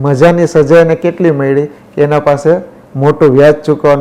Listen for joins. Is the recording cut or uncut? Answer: uncut